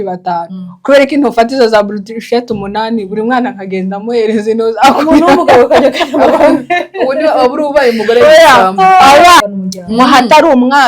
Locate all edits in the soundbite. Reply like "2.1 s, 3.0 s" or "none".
9.4 s